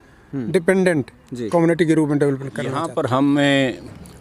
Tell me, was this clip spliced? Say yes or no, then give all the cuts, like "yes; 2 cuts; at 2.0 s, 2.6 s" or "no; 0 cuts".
yes; 1 cut; at 2.8 s